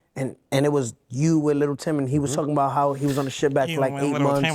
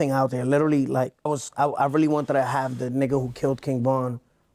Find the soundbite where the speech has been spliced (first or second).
second